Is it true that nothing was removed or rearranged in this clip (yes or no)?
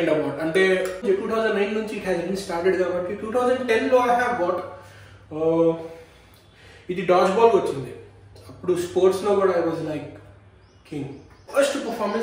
no